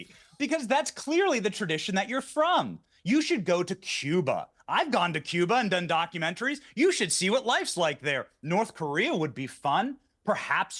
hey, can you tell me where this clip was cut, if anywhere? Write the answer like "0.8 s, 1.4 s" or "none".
4.4 s